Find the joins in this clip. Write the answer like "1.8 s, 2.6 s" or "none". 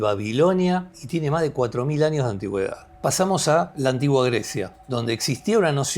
1.0 s, 2.8 s, 3.7 s, 4.8 s